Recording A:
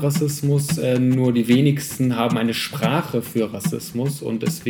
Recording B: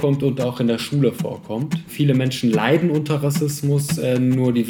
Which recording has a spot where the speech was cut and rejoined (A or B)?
B